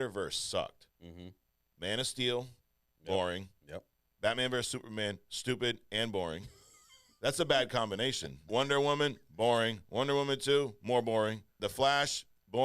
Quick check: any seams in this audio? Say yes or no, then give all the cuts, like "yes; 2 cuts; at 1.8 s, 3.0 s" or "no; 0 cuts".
yes; 2 cuts; at 8.4 s, 11.6 s